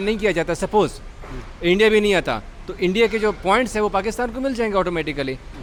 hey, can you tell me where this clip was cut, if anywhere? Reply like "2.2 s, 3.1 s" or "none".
none

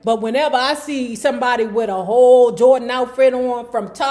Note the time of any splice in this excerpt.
none

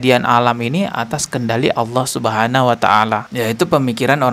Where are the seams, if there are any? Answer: none

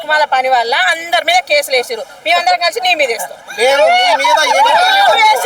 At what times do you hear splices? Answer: none

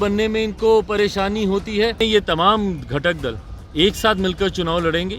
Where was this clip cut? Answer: 2.0 s

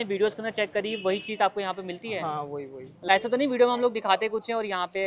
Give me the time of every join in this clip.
none

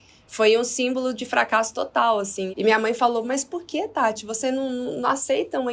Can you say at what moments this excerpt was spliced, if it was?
2.5 s

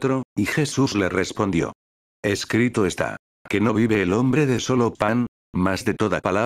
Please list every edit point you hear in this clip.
none

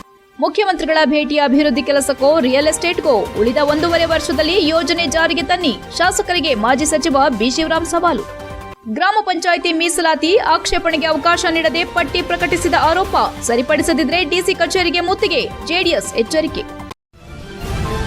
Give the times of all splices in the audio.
16.9 s

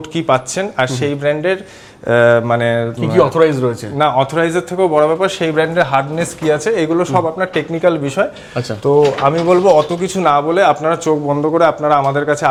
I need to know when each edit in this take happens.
none

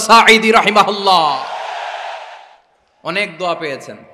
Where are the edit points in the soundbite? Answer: 2.3 s

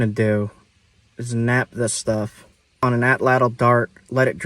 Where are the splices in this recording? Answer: 2.8 s

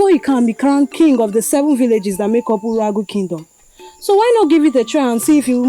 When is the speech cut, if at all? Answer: none

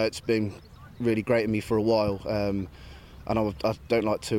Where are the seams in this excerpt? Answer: none

